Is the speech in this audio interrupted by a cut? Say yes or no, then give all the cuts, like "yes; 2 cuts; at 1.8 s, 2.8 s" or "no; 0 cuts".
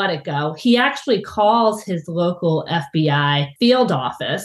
yes; 1 cut; at 3.5 s